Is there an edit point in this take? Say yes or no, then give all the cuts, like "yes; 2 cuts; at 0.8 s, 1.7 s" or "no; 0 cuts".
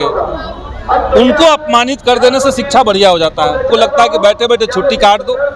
yes; 1 cut; at 3.7 s